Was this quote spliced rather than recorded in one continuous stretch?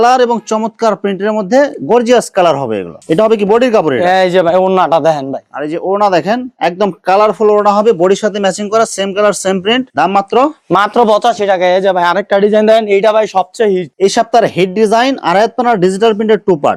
no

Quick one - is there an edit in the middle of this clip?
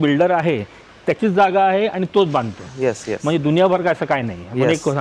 no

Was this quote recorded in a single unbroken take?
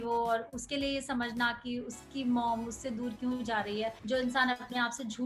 no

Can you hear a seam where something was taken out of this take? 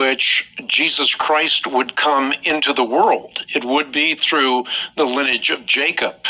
yes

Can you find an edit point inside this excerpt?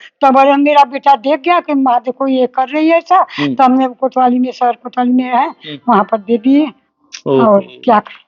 no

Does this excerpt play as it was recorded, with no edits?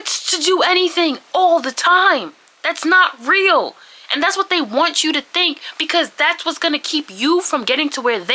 yes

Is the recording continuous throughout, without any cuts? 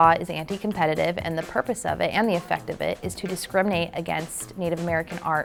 yes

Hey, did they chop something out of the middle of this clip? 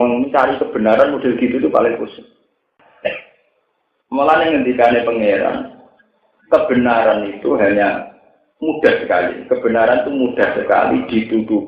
yes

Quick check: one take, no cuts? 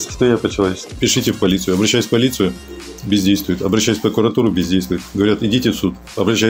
no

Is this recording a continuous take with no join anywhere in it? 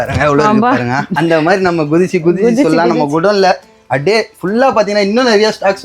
no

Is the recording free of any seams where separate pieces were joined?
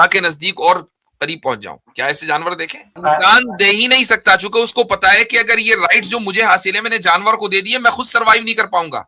no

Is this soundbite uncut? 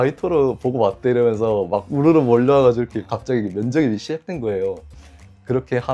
yes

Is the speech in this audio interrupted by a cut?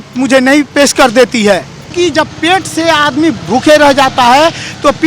yes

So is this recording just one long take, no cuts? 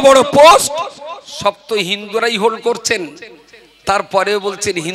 yes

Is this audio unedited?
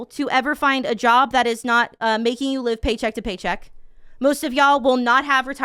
yes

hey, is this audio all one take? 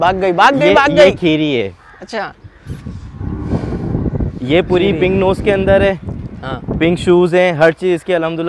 yes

